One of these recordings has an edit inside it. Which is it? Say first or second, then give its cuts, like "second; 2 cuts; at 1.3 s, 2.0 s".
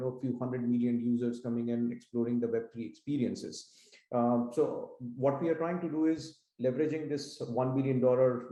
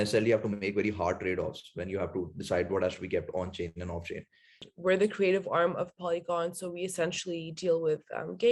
second; 1 cut; at 4.6 s